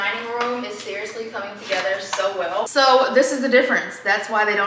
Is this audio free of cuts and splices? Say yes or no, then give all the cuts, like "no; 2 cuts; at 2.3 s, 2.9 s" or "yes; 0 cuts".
no; 1 cut; at 2.7 s